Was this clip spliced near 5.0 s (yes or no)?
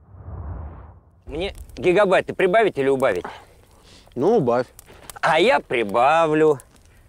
no